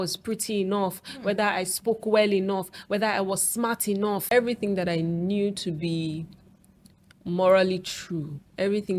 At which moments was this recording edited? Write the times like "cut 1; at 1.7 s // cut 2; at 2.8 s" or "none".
cut 1; at 4.2 s